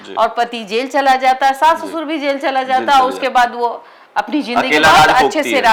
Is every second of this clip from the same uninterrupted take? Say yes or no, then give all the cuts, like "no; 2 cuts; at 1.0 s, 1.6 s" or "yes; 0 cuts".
yes; 0 cuts